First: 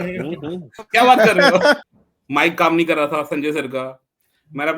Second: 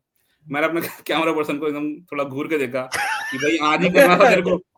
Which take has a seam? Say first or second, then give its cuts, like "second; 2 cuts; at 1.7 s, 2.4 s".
first; 1 cut; at 1.8 s